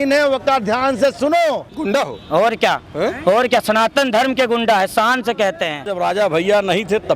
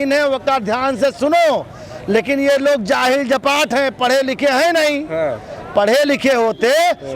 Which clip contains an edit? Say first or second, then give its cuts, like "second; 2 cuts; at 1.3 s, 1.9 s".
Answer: first; 2 cuts; at 1.8 s, 5.9 s